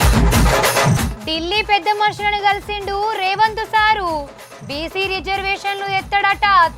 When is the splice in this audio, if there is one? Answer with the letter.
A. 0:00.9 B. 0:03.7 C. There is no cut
C